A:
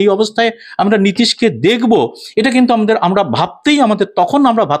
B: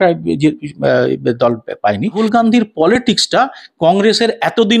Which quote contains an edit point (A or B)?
B